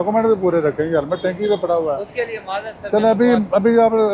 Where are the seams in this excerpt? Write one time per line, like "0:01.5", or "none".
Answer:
none